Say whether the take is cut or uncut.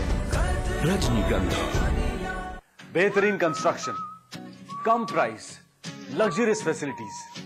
cut